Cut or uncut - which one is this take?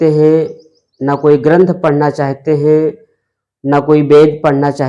uncut